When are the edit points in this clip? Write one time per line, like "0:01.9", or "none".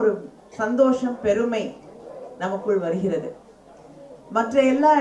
none